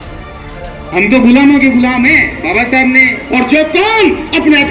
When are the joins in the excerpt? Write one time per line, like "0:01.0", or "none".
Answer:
0:03.2